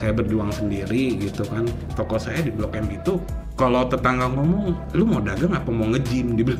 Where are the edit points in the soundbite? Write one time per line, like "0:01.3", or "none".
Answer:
0:01.9
0:03.4
0:04.8